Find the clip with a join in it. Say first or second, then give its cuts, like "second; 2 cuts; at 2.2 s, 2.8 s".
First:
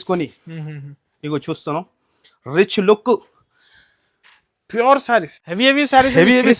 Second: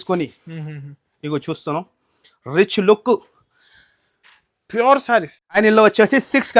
first; 1 cut; at 5.4 s